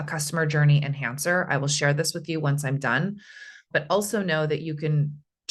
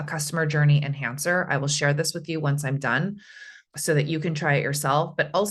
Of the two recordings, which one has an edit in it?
first; 1 cut; at 3.7 s

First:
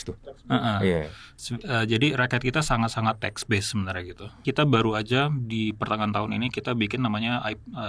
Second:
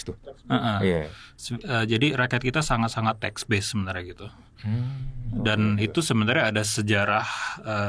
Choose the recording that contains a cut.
first; 1 cut; at 4.4 s

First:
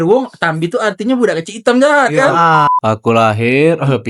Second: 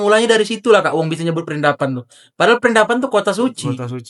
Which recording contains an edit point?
first; 1 cut; at 2.7 s

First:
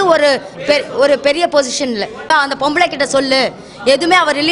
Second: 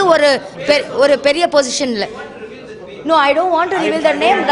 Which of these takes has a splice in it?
first; 1 cut; at 2.3 s

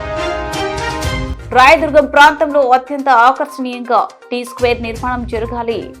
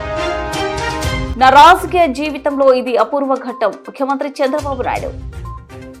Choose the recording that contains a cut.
first; 1 cut; at 1.3 s

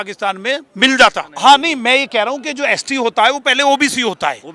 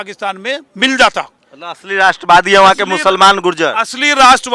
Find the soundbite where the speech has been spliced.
first; 1 cut; at 1.3 s

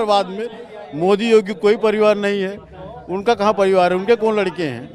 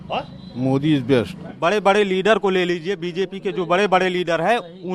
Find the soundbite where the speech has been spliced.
second; 1 cut; at 1.5 s

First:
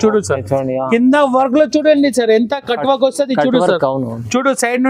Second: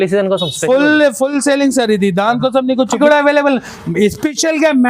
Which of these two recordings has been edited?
second; 1 cut; at 3.0 s

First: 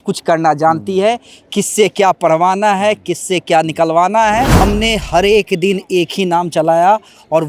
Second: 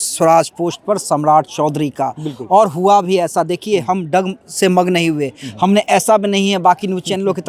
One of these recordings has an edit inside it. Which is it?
first; 1 cut; at 4.5 s

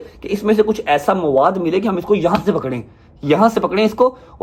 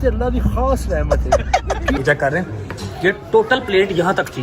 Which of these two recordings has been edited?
second; 1 cut; at 2.0 s

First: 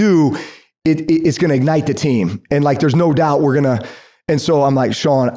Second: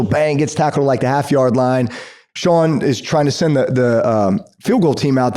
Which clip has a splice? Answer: second; 1 cut; at 2.2 s

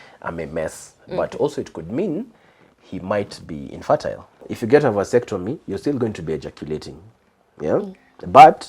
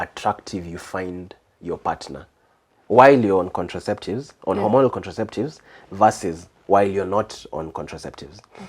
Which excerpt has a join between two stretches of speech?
first; 1 cut; at 4.5 s

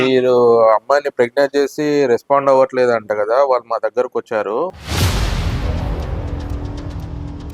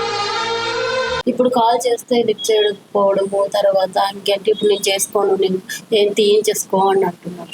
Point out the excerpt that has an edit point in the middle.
second; 1 cut; at 1.2 s

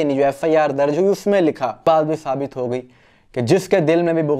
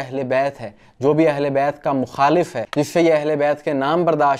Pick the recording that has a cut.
first; 1 cut; at 1.8 s

